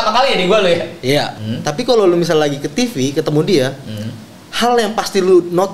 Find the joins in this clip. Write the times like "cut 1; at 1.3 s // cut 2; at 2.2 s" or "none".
cut 1; at 1.3 s